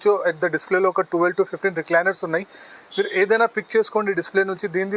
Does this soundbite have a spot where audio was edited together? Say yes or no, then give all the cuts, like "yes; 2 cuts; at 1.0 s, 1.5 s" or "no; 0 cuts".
no; 0 cuts